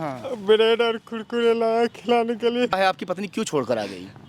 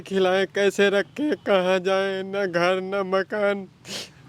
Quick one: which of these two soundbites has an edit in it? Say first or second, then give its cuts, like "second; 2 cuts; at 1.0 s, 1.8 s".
first; 1 cut; at 2.7 s